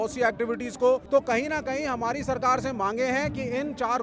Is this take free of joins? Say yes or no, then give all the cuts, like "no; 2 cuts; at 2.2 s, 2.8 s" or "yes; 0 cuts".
no; 1 cut; at 1.0 s